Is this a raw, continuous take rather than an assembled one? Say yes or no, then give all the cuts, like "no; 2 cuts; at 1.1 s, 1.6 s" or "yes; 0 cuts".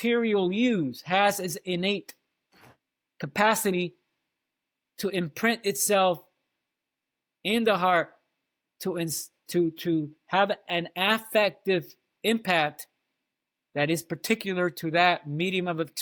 yes; 0 cuts